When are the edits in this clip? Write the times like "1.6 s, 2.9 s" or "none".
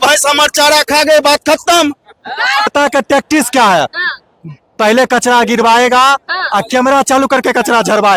2.7 s

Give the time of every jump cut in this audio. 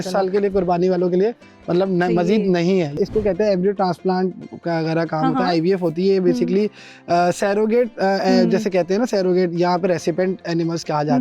2.9 s

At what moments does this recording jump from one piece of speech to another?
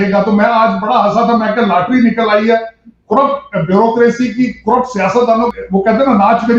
5.5 s

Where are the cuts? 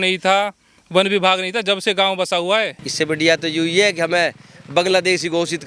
2.8 s

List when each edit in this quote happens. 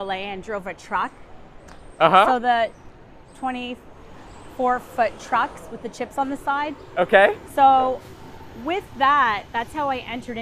none

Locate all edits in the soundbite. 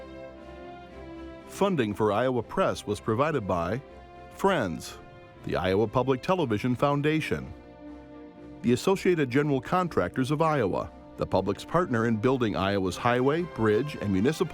1.5 s

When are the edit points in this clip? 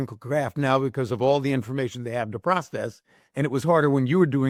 none

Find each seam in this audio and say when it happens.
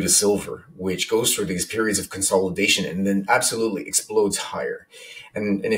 none

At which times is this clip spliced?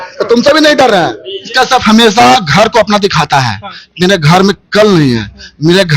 none

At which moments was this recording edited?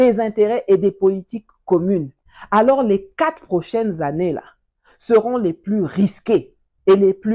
2.2 s

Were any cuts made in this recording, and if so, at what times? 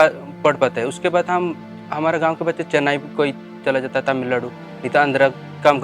none

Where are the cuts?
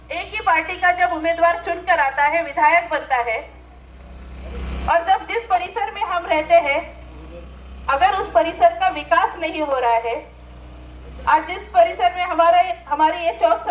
none

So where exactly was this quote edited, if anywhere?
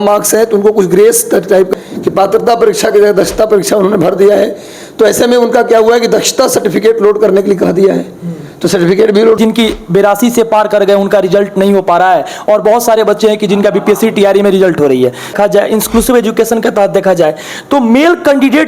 1.7 s, 9.4 s, 15.3 s

